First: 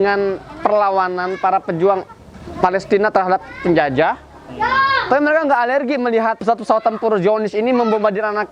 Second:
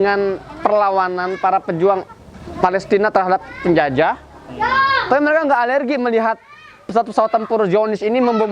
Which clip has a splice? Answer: first; 1 cut; at 6.4 s

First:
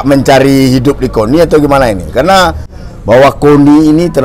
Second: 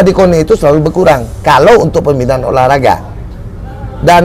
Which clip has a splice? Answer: first; 1 cut; at 2.7 s

